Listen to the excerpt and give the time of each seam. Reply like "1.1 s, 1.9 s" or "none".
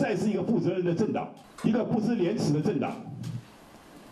1.4 s